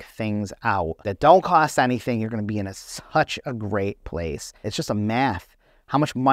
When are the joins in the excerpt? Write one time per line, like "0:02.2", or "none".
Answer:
0:01.0
0:04.7